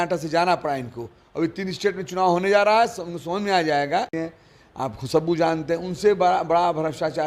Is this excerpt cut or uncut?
cut